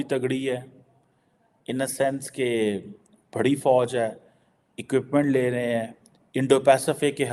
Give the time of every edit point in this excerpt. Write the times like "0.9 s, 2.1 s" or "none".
none